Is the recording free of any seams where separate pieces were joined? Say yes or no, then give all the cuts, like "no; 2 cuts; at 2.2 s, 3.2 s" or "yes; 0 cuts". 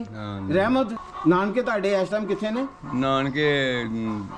no; 1 cut; at 1.0 s